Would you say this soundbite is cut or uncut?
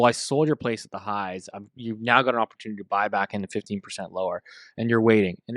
uncut